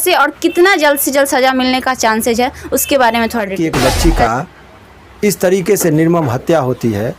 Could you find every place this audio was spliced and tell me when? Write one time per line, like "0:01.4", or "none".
0:03.5

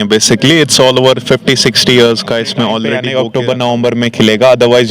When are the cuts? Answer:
0:03.0

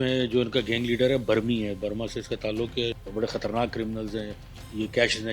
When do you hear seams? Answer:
0:03.0

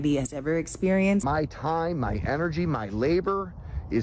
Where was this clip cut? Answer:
0:01.2

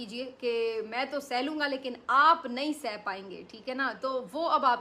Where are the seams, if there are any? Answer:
none

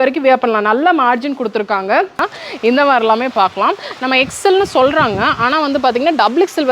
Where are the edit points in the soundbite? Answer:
0:02.2

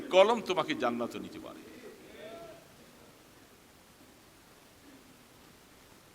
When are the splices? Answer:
none

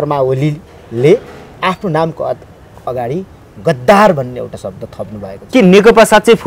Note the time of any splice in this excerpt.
0:05.4

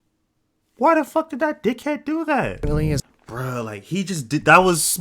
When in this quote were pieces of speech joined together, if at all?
0:03.0

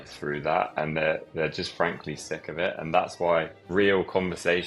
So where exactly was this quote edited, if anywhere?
0:03.6

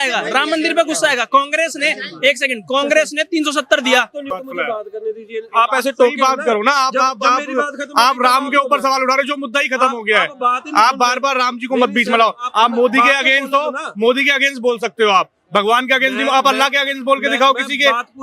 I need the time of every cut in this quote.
0:04.3

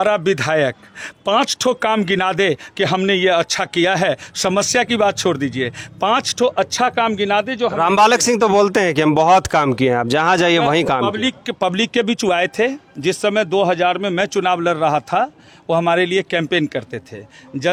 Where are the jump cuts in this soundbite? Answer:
none

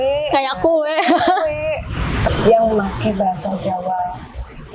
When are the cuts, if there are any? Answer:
0:02.2

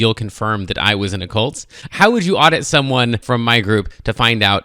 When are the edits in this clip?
0:01.8
0:03.2

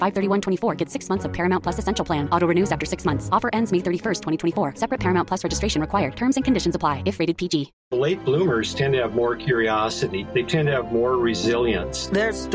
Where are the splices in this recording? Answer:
0:07.8

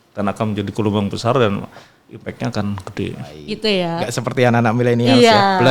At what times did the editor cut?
0:03.4

